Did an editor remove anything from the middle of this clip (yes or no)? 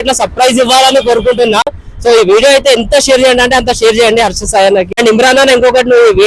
yes